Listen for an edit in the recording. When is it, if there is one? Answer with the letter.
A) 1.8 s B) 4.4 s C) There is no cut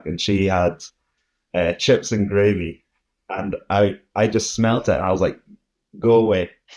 C